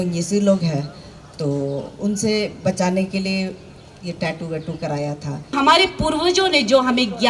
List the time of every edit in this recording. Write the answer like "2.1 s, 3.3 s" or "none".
5.5 s